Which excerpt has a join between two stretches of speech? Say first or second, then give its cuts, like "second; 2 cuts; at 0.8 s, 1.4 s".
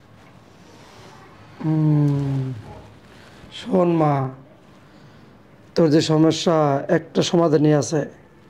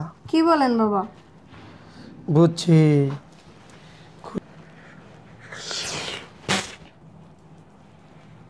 second; 2 cuts; at 4.4 s, 7.0 s